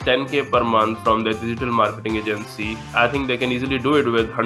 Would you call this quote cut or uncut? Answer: uncut